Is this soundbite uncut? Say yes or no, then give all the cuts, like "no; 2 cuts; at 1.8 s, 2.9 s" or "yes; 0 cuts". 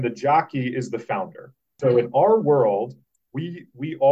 no; 1 cut; at 1.8 s